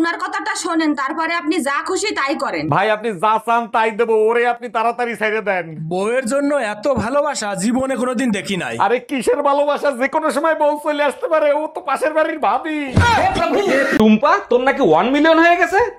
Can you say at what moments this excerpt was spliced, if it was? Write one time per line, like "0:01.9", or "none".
0:14.0